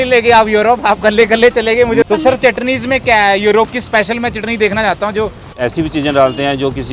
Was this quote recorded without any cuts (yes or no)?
no